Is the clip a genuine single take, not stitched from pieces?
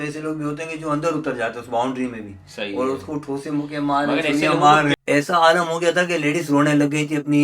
no; 1 cut; at 4.9 s

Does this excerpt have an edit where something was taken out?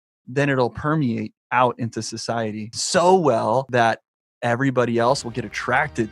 yes; 4 cuts; at 1.4 s, 2.7 s, 3.7 s, 5.2 s

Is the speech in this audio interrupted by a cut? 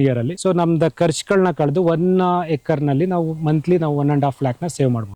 no; 0 cuts

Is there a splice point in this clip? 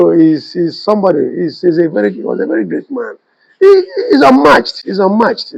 no; 0 cuts

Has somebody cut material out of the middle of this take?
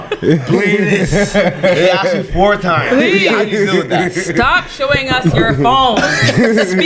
no; 0 cuts

